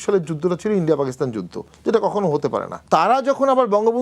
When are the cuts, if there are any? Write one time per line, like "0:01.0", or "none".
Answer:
0:02.8